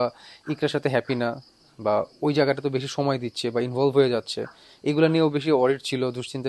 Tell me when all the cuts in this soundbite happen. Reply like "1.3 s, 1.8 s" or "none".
none